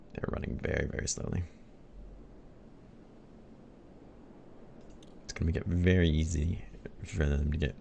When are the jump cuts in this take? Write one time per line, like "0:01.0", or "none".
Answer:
none